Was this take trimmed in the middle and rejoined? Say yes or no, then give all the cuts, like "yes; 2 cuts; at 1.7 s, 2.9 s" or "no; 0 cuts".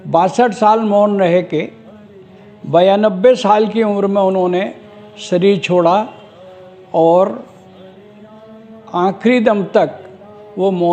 no; 0 cuts